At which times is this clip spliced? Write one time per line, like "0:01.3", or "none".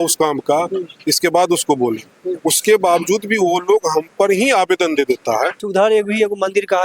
0:05.6